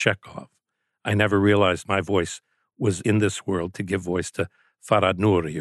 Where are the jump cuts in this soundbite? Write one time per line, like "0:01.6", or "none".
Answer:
0:03.0

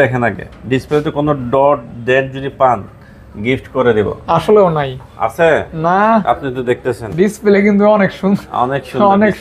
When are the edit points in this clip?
none

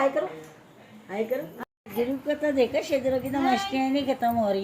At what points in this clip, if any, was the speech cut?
0:01.6

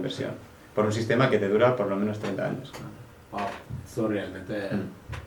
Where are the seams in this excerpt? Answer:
none

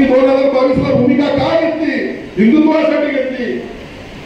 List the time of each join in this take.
none

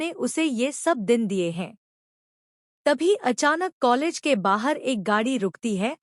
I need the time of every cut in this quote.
0:04.0

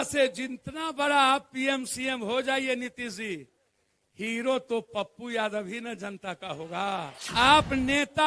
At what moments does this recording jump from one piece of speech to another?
0:07.2

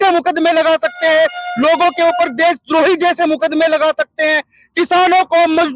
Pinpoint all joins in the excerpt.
none

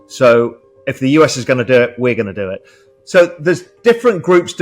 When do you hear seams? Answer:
0:03.7

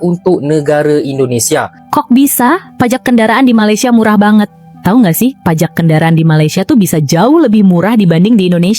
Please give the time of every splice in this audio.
0:01.8

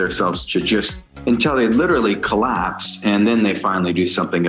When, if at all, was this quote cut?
none

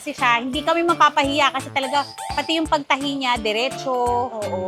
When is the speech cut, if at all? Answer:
none

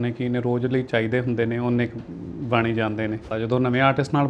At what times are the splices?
0:03.3

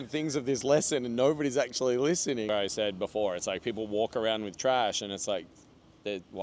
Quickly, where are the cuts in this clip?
0:02.5

